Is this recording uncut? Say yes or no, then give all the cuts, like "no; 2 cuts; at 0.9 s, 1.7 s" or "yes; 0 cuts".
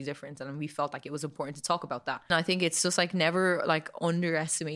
no; 1 cut; at 2.3 s